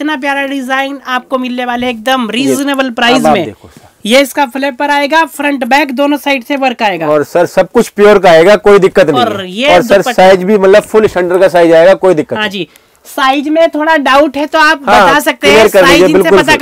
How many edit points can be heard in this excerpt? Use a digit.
0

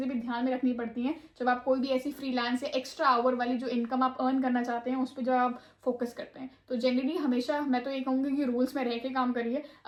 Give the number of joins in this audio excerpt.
0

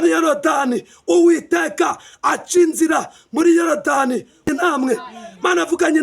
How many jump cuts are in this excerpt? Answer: 1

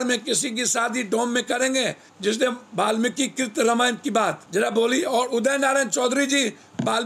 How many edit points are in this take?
2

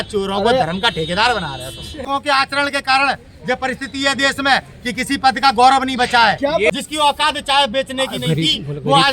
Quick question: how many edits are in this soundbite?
2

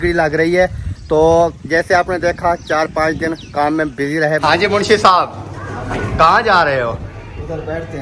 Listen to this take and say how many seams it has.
1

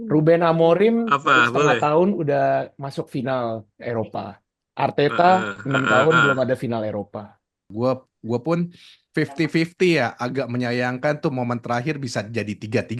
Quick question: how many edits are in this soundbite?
1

